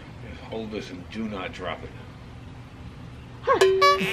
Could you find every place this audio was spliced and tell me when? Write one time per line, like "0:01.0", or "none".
none